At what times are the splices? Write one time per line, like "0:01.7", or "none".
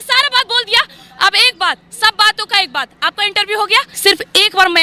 0:03.9